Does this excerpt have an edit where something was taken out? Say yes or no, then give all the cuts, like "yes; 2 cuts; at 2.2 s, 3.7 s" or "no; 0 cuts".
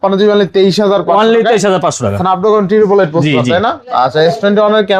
no; 0 cuts